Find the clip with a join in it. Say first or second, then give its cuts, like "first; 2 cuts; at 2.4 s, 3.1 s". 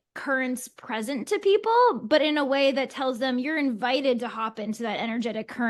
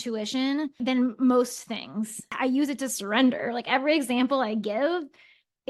second; 1 cut; at 2.2 s